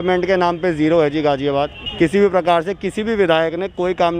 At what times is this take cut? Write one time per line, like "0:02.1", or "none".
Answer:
0:01.8